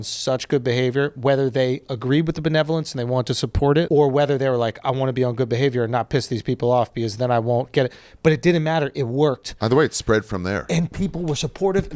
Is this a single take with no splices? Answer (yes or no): no